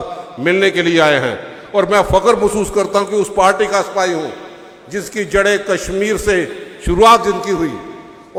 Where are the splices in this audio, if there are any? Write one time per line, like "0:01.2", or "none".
none